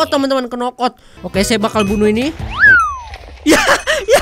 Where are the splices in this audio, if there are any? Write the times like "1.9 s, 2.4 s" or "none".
1.3 s